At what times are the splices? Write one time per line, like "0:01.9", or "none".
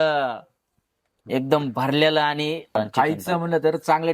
0:02.7